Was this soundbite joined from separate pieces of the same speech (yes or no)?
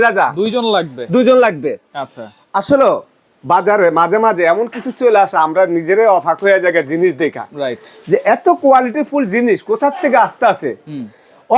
no